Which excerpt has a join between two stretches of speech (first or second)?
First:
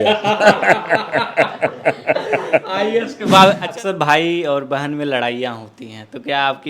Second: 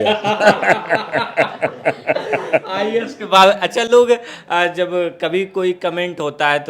first